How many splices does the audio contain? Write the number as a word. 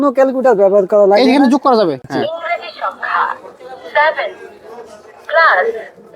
one